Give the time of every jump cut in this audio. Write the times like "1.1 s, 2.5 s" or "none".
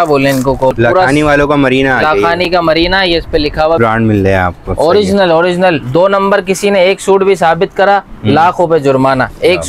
0.8 s, 3.8 s